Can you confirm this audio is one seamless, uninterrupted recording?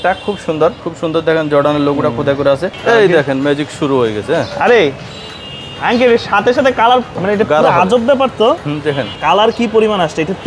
no; 4 cuts; at 0.8 s, 2.7 s, 7.1 s, 9.1 s

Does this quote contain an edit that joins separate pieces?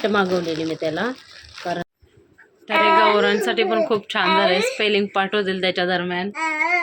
yes; 1 cut; at 1.8 s

